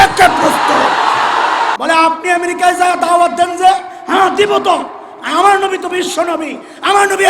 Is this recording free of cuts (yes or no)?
no